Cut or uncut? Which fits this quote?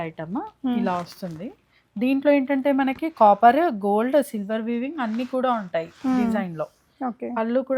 uncut